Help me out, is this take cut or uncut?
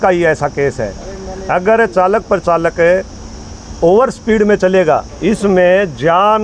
cut